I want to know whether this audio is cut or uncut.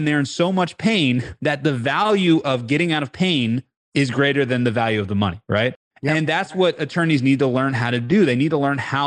uncut